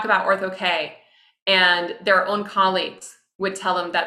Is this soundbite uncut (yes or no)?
yes